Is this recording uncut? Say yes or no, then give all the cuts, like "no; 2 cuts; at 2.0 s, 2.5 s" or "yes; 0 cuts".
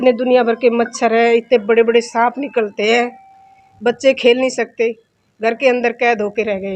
yes; 0 cuts